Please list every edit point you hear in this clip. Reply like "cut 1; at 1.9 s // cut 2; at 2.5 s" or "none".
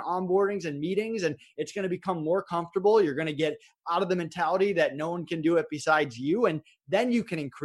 none